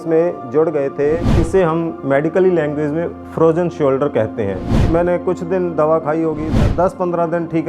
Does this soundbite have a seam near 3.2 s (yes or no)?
no